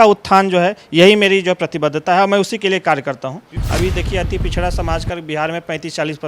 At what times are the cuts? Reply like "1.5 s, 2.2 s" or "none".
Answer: 3.5 s